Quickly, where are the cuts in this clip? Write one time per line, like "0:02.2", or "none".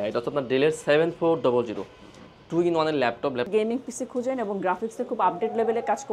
0:03.5